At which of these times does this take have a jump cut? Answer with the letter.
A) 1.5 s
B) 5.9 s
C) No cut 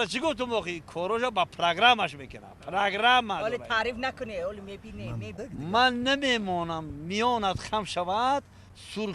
A